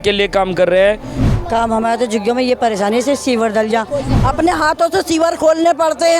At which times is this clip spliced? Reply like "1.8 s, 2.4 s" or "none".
1.1 s, 4.2 s